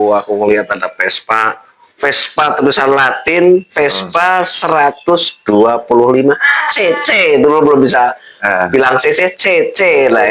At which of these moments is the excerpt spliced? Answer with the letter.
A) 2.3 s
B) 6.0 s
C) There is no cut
C